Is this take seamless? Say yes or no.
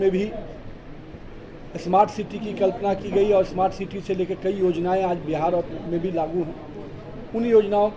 yes